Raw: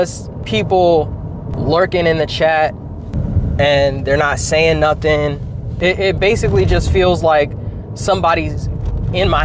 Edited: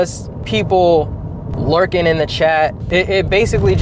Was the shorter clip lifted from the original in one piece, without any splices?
no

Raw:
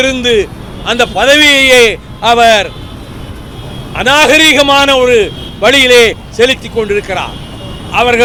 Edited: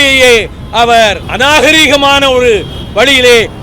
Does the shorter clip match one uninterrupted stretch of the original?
no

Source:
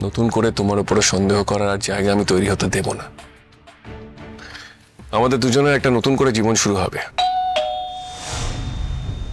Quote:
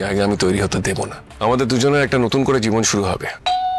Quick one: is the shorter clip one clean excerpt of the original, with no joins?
no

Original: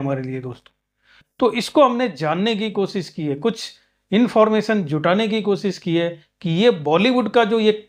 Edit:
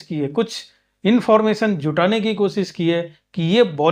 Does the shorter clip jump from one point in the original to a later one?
no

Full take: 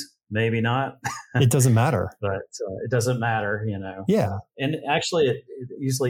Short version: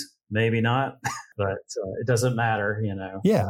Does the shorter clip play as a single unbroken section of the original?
no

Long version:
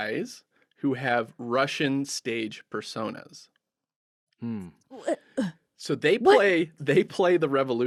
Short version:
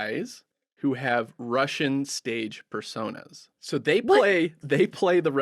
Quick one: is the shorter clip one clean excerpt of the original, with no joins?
no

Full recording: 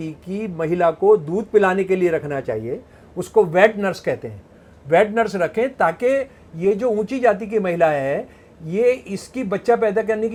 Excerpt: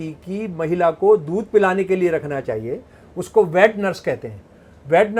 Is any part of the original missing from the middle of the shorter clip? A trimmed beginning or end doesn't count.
no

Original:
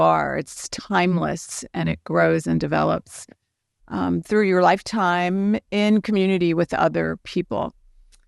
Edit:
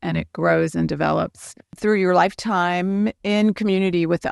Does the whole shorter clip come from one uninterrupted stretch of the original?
no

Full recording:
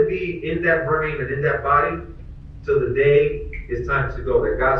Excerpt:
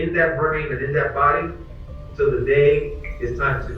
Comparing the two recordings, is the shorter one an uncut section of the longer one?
yes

